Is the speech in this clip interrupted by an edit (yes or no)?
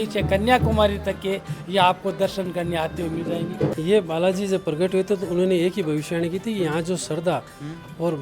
yes